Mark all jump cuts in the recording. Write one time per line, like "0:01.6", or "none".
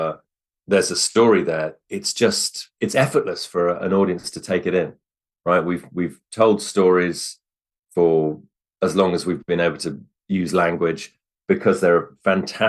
none